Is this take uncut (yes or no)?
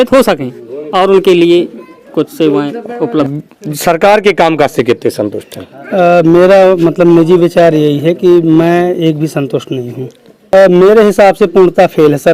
no